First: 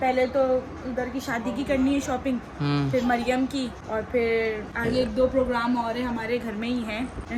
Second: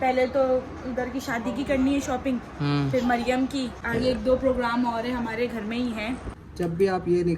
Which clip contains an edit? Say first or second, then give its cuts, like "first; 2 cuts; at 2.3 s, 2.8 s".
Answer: second; 2 cuts; at 3.8 s, 6.3 s